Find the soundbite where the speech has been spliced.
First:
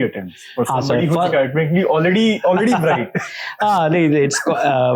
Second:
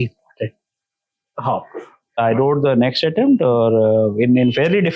second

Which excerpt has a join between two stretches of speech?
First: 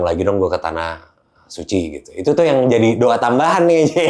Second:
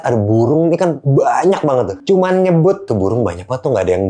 second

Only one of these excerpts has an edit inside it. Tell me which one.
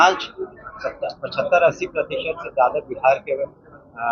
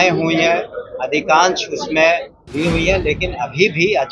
second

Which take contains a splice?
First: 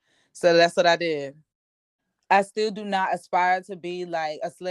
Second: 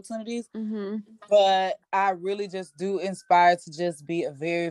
first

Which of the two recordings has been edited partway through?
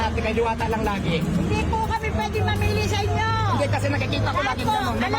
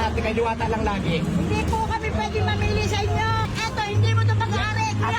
second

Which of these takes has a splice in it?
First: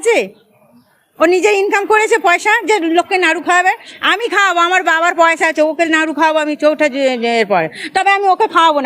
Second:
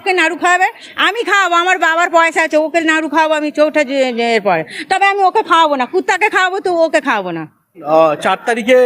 second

